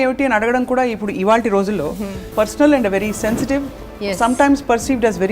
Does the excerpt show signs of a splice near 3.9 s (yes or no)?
no